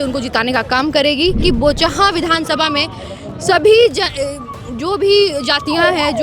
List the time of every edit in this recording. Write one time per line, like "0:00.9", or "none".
0:01.4